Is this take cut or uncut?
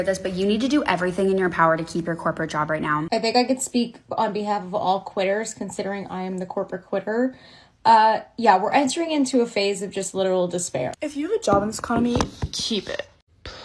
cut